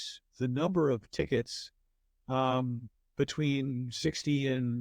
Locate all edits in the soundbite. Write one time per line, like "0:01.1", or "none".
none